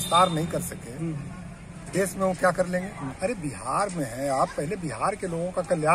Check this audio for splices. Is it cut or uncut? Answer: cut